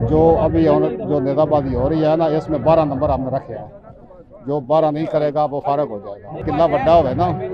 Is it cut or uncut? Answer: cut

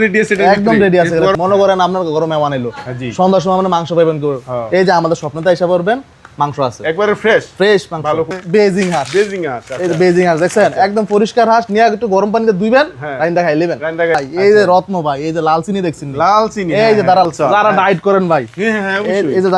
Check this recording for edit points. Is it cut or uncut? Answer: cut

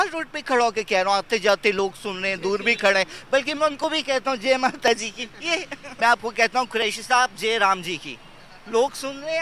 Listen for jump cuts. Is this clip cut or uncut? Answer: cut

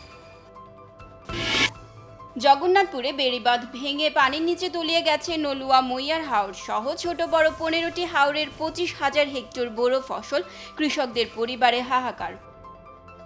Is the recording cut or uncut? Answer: cut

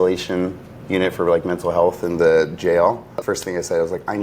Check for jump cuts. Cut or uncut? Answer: cut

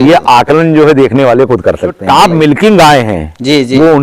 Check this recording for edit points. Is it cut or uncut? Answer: cut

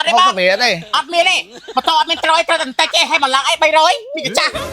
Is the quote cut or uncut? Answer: uncut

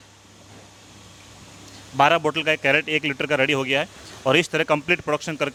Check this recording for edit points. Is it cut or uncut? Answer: uncut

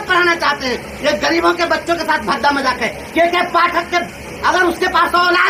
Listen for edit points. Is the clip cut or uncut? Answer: uncut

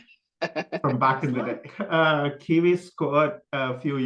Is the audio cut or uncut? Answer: cut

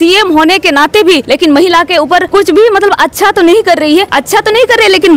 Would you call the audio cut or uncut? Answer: cut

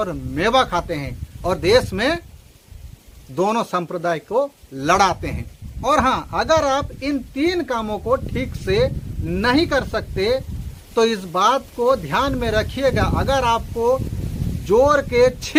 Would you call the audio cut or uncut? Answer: uncut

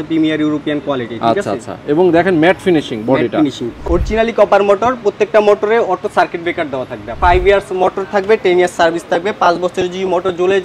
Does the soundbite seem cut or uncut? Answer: cut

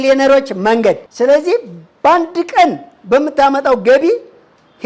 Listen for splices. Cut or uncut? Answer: cut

